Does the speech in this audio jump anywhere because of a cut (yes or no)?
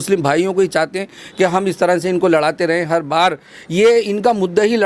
no